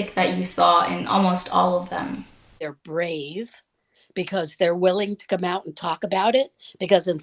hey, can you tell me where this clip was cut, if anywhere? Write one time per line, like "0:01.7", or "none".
0:02.7